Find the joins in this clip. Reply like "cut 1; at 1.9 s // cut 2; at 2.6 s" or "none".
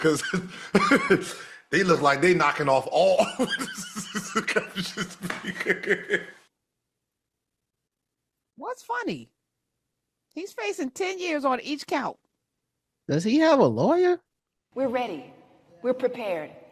cut 1; at 14.7 s